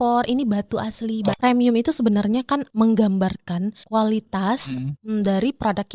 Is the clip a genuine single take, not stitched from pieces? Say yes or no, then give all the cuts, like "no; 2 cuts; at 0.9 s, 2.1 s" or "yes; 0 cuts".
no; 4 cuts; at 1.4 s, 2.7 s, 3.8 s, 4.9 s